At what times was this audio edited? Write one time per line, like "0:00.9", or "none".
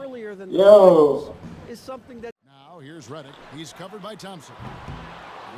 0:02.4